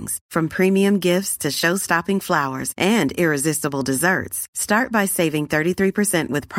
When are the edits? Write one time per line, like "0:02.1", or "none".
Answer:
none